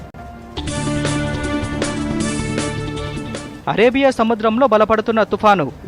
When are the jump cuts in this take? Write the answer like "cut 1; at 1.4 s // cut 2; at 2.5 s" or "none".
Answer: none